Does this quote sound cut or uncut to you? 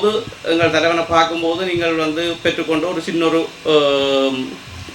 uncut